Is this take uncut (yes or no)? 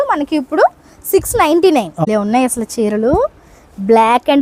no